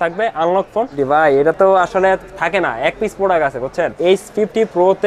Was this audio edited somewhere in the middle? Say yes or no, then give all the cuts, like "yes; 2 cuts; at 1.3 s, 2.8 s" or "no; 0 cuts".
yes; 2 cuts; at 1.0 s, 3.9 s